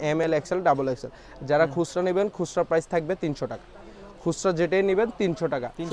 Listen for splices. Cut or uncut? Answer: uncut